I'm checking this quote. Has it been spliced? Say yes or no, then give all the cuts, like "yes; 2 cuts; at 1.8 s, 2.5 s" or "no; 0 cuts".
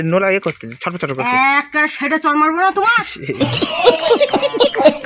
yes; 1 cut; at 3.2 s